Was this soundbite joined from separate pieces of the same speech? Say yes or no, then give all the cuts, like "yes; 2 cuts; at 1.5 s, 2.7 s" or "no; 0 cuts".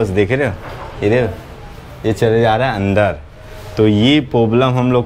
no; 0 cuts